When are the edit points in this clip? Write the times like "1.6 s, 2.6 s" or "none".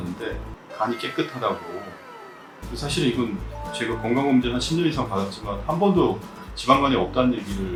none